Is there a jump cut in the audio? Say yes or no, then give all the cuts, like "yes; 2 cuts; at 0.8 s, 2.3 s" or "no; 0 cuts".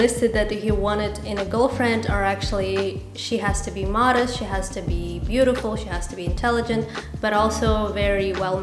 no; 0 cuts